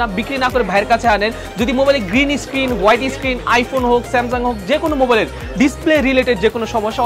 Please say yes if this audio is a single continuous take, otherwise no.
yes